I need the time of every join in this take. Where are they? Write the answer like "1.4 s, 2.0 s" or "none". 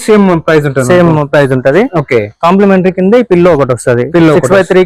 none